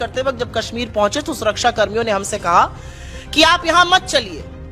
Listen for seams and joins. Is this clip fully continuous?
yes; 0 cuts

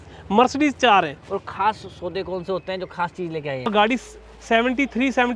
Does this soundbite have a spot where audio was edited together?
yes; 1 cut; at 3.7 s

